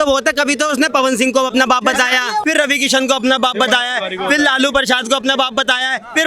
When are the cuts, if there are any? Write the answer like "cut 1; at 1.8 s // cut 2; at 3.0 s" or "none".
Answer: cut 1; at 2.4 s